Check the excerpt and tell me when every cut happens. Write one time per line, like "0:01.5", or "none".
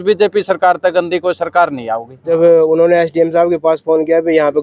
0:02.2